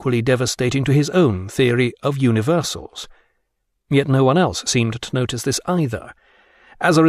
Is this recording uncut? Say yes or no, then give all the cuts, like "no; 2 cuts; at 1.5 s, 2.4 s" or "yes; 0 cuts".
yes; 0 cuts